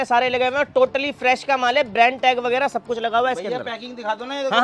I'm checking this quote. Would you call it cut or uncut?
uncut